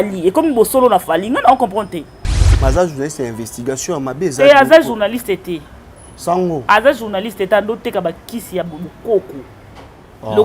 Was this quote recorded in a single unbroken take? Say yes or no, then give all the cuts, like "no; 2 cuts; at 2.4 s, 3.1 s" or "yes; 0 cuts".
no; 1 cut; at 2.5 s